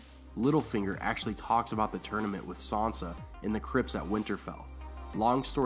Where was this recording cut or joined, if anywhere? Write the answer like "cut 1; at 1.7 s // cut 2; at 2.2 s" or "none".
none